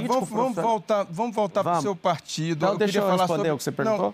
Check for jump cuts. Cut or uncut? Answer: uncut